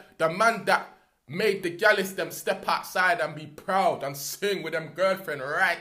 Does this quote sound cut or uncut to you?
uncut